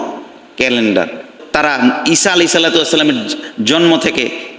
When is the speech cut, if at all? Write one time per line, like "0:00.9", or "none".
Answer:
0:01.3